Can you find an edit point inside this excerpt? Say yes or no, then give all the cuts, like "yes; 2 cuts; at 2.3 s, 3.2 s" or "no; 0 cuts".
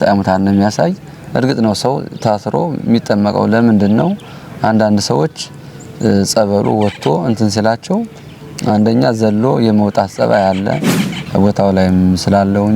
yes; 1 cut; at 11.1 s